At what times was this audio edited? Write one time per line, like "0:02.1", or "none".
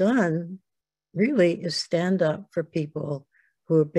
none